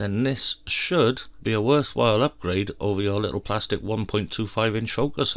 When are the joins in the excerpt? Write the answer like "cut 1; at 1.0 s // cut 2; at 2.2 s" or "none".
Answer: cut 1; at 1.3 s